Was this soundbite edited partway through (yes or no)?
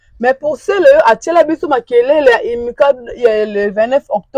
no